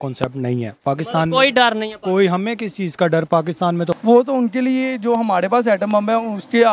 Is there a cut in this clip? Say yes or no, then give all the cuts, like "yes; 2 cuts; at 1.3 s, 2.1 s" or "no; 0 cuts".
yes; 1 cut; at 4.0 s